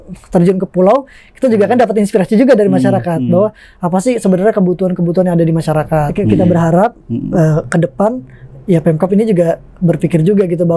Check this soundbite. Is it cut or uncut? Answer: cut